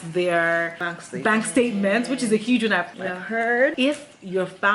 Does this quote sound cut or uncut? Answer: cut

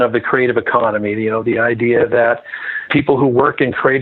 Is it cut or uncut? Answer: cut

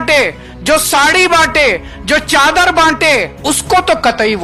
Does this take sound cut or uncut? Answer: uncut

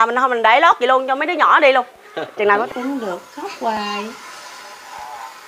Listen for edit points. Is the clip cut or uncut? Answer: cut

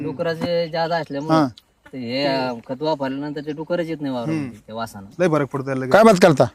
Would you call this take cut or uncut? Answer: uncut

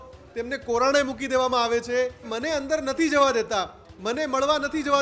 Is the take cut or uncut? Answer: cut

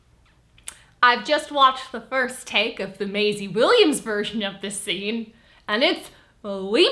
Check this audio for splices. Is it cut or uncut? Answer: uncut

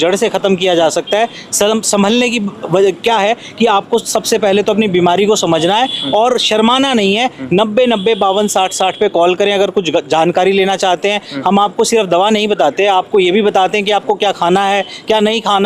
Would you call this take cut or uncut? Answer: uncut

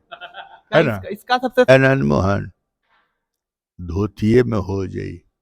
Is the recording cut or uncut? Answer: cut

